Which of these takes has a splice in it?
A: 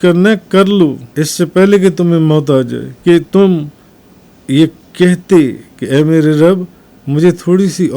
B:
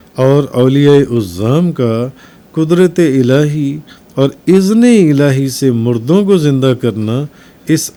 A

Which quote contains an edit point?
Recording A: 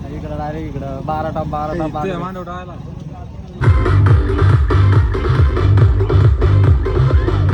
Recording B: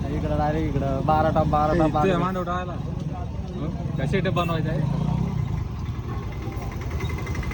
A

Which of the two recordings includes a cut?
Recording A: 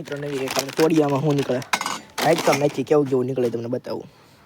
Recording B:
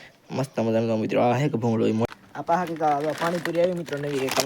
B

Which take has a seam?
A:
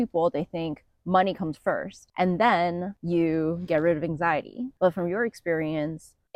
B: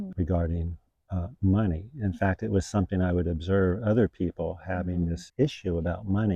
A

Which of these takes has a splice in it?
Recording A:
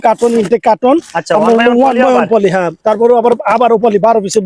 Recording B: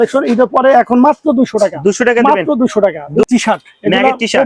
B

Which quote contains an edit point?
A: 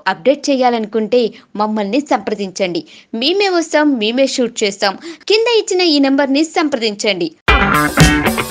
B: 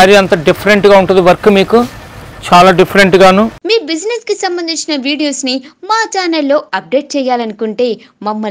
B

